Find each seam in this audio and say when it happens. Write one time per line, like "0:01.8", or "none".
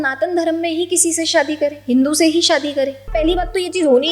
0:03.1